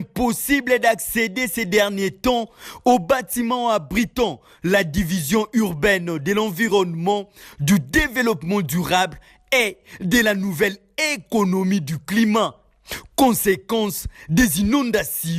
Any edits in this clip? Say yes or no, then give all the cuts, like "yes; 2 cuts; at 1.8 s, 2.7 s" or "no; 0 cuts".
no; 0 cuts